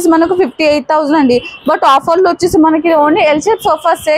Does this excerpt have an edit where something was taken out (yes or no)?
no